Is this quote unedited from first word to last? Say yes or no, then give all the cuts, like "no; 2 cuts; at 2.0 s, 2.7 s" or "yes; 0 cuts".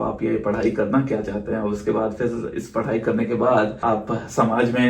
no; 1 cut; at 3.8 s